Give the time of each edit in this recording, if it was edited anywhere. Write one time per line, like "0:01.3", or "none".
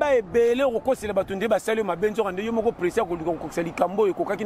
none